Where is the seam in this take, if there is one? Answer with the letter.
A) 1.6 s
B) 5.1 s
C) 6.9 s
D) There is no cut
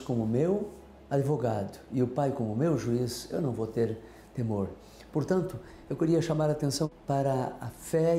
C